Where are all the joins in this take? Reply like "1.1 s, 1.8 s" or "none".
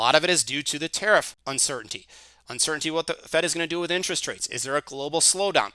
1.3 s